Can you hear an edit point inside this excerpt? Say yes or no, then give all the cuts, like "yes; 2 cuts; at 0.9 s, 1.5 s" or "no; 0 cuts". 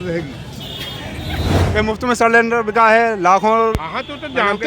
yes; 1 cut; at 1.6 s